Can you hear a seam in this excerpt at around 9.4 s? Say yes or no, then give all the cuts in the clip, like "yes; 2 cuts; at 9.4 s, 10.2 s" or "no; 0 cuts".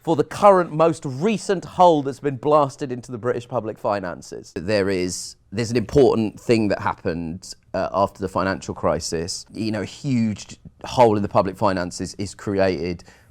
yes; 2 cuts; at 4.6 s, 9.4 s